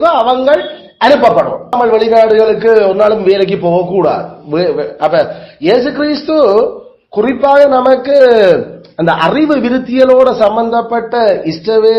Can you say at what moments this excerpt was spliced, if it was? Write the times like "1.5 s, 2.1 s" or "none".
1.7 s